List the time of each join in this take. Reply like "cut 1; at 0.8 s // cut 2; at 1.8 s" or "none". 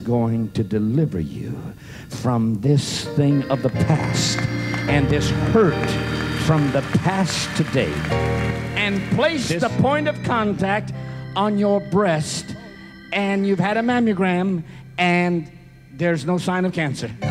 cut 1; at 8.7 s